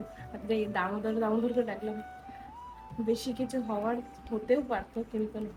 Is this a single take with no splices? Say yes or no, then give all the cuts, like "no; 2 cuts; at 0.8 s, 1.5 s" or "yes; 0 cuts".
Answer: yes; 0 cuts